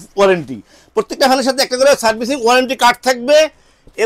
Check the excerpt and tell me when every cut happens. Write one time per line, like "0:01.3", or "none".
none